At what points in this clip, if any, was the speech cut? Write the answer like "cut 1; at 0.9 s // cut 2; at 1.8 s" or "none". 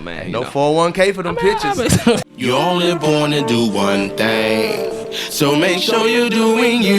cut 1; at 2.3 s